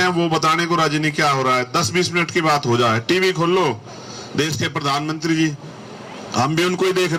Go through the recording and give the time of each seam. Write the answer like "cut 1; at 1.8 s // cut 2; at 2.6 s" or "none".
none